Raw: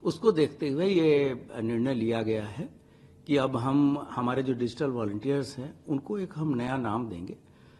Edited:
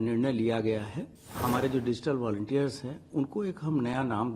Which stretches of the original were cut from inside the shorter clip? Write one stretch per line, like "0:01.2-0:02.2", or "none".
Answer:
0:03.0-0:04.1